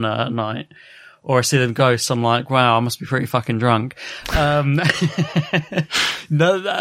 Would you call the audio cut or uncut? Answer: uncut